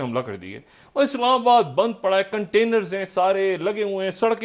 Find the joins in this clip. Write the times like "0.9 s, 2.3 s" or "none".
none